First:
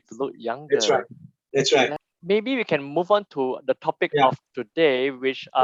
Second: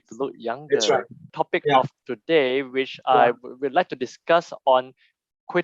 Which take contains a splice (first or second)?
second